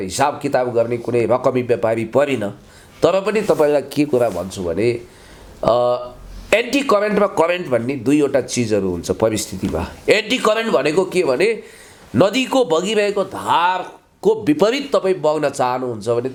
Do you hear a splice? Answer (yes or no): no